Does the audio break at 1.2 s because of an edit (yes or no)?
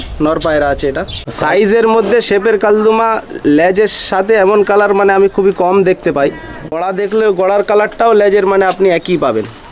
yes